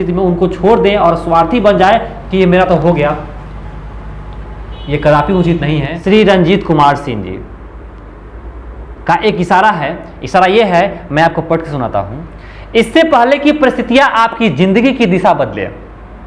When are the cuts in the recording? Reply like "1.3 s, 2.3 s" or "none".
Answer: 5.9 s